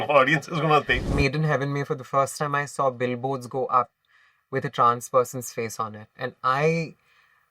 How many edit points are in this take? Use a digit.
1